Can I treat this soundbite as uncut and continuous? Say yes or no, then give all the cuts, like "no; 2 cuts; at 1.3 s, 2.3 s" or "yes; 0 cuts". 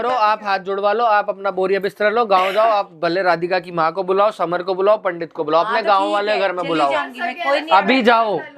yes; 0 cuts